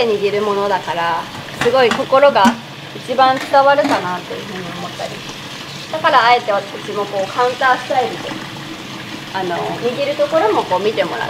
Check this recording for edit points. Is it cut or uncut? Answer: uncut